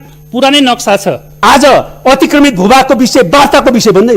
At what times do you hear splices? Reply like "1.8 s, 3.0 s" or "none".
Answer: 1.3 s